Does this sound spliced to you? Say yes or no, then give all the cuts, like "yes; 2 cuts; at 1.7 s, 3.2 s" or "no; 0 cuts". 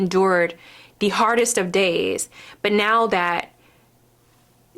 no; 0 cuts